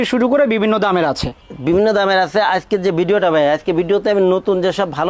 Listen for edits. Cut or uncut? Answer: uncut